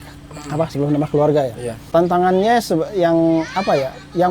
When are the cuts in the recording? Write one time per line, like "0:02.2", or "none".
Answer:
0:01.7